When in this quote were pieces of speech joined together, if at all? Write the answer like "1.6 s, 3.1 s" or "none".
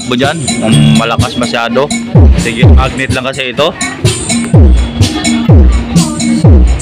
4.2 s